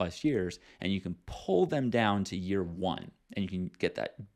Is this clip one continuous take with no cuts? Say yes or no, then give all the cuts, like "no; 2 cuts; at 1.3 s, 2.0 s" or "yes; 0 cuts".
yes; 0 cuts